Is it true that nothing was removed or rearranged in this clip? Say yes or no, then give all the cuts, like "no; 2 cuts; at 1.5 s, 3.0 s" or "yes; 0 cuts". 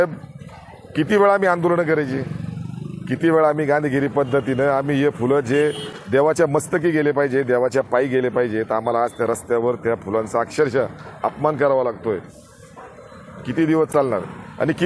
yes; 0 cuts